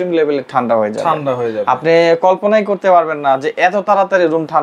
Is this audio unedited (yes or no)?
yes